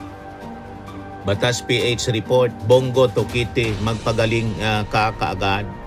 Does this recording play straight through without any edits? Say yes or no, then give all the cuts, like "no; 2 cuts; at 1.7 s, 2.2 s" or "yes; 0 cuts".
yes; 0 cuts